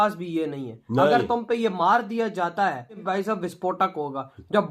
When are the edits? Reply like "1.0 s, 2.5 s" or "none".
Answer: 3.0 s